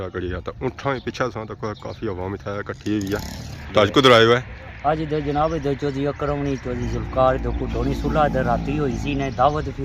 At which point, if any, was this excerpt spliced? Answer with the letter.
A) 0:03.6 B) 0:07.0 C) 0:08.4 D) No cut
A